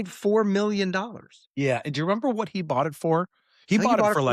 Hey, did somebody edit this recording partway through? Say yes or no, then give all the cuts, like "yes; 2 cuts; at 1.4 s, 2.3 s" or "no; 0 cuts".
no; 0 cuts